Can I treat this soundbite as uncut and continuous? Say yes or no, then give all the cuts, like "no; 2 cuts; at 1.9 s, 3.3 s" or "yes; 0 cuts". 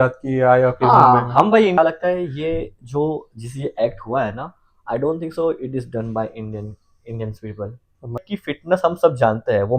no; 2 cuts; at 1.8 s, 8.2 s